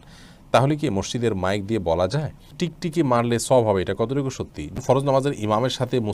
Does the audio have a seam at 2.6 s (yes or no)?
yes